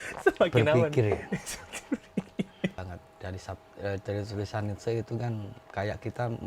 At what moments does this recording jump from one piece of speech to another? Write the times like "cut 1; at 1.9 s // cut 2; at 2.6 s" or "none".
cut 1; at 2.8 s